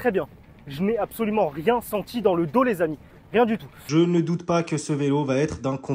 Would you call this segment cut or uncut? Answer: cut